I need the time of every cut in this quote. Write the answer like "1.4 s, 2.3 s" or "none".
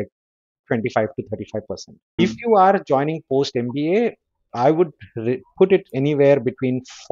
2.2 s